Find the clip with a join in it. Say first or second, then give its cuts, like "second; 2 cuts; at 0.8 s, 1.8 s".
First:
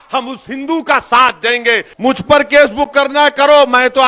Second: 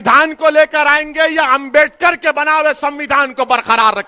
first; 1 cut; at 1.9 s